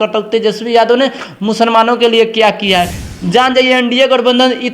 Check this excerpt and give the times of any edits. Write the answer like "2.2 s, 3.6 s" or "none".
3.0 s